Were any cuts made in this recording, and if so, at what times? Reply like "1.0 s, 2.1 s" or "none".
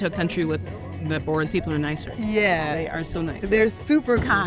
none